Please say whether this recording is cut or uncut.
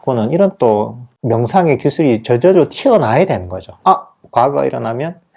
cut